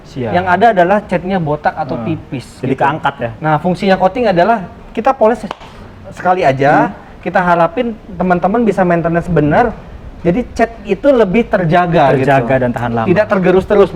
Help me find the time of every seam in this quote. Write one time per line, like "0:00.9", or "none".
none

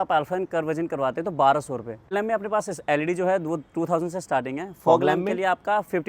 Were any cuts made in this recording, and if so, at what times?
0:02.1

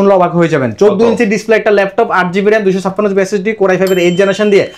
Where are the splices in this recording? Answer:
none

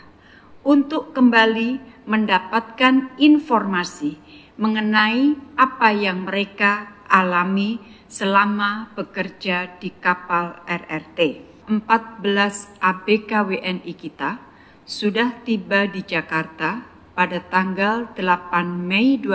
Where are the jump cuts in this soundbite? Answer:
0:11.5

